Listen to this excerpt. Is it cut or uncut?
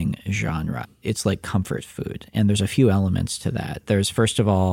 cut